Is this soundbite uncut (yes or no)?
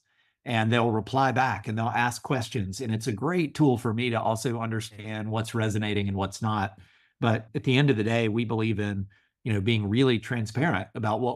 no